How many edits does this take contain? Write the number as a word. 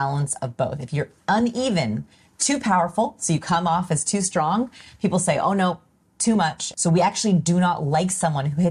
one